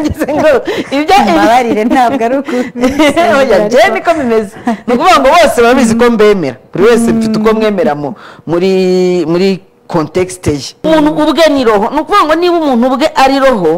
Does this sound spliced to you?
yes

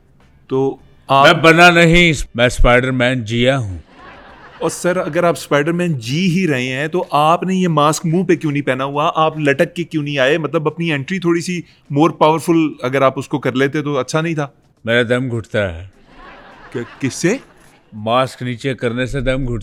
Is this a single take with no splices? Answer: yes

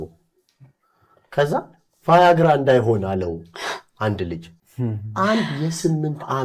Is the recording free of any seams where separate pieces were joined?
no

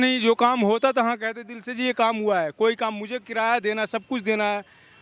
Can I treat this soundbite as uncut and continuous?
yes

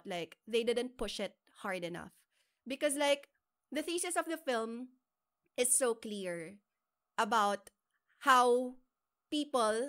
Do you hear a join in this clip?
no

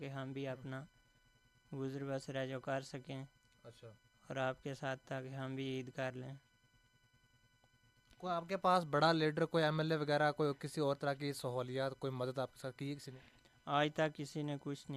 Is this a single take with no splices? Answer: yes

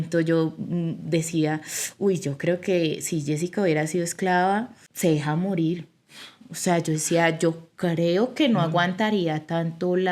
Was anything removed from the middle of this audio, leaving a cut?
yes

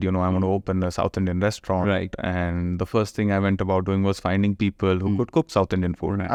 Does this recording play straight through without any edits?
yes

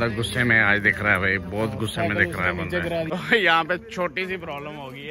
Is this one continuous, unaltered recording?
no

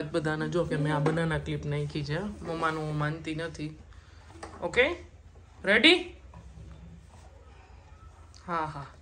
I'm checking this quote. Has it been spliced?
no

